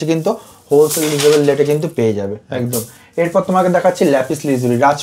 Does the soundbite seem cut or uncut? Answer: uncut